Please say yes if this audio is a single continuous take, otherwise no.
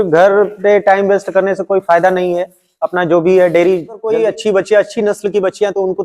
no